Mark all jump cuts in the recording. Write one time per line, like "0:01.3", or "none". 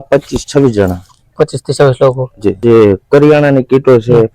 0:02.5